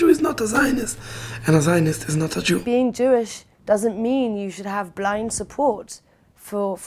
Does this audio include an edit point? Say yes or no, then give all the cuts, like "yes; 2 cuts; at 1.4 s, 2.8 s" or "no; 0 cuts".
yes; 1 cut; at 2.6 s